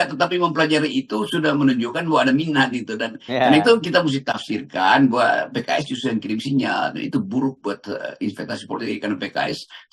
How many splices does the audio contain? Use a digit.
0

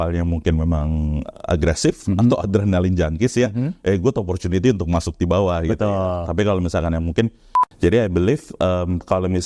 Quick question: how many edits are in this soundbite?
1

